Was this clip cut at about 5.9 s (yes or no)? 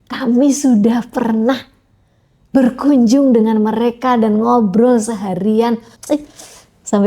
yes